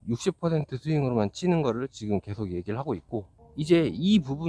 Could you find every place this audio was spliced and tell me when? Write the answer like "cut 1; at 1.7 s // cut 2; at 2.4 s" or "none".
cut 1; at 3.4 s